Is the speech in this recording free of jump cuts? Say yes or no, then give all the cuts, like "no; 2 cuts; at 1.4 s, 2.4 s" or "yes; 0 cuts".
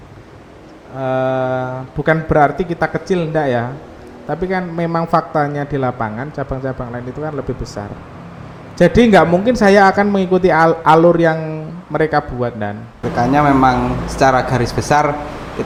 yes; 0 cuts